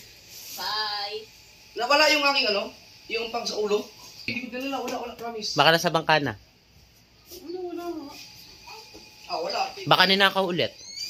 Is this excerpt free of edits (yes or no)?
yes